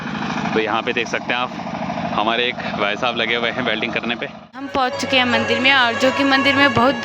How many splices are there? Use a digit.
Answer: 1